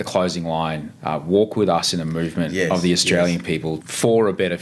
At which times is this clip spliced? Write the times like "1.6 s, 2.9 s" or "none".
0.9 s, 3.7 s